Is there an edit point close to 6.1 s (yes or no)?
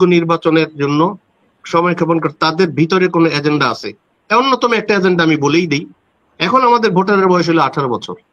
no